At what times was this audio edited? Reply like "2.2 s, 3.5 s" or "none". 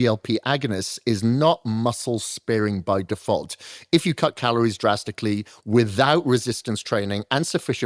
none